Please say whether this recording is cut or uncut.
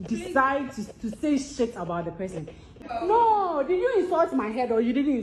cut